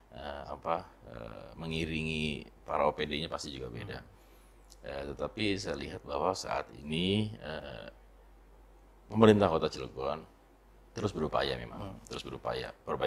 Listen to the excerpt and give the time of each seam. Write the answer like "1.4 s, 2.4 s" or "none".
none